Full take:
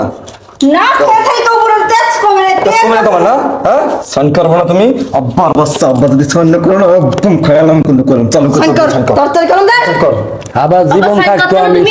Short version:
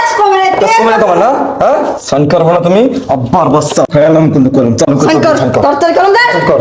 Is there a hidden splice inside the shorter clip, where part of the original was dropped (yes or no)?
yes